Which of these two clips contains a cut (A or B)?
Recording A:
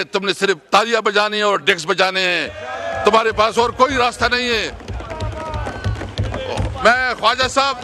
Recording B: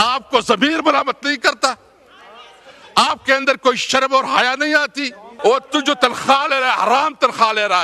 B